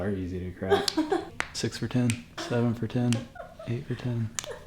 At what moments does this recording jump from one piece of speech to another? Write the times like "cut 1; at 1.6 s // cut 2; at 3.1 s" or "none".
cut 1; at 1.4 s // cut 2; at 2.4 s